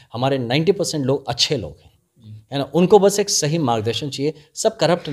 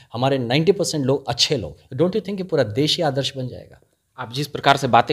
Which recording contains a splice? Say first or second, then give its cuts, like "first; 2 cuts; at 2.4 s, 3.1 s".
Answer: second; 1 cut; at 1.8 s